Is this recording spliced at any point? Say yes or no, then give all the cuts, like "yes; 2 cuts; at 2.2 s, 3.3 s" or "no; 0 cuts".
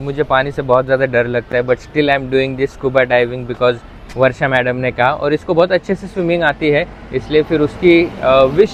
no; 0 cuts